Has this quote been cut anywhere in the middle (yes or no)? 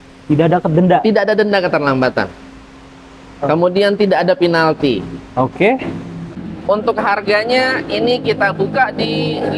yes